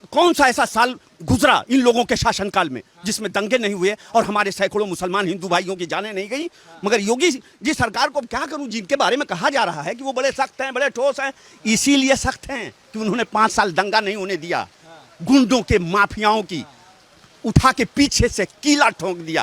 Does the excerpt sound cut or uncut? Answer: uncut